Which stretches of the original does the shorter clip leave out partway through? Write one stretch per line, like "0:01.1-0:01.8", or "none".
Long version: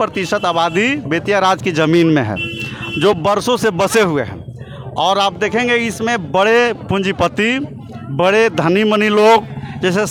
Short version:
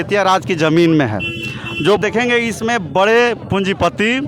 0:03.2-0:05.4